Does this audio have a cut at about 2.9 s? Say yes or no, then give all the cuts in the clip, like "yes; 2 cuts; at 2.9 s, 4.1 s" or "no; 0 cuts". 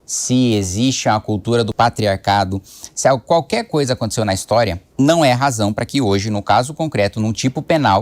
no; 2 cuts; at 1.7 s, 4.8 s